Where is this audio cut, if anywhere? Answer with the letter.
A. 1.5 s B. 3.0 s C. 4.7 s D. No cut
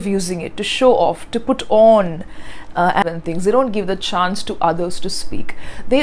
B